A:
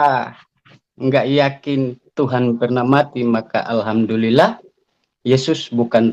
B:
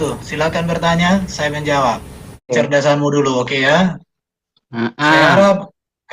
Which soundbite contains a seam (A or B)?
B